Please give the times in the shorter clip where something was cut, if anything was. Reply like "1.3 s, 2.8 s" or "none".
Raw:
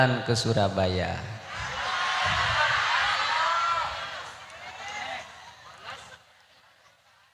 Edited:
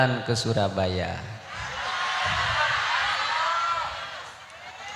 none